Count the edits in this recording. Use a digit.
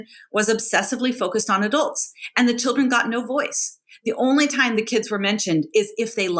0